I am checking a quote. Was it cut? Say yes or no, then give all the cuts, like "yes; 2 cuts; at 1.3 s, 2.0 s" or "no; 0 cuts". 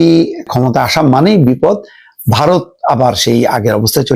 no; 0 cuts